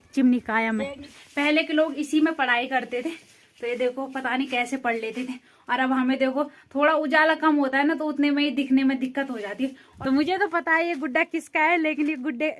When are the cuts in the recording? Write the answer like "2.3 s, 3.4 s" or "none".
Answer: 1.2 s, 9.8 s